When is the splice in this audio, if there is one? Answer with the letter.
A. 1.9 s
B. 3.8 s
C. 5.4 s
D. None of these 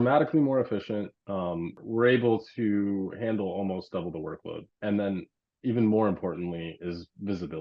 D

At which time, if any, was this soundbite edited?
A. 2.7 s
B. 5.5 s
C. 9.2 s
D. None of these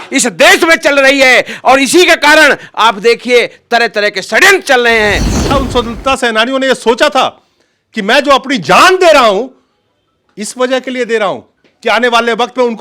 B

